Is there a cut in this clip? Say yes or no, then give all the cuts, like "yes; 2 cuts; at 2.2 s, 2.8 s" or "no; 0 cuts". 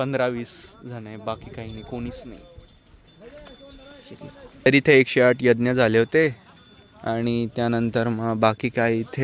no; 0 cuts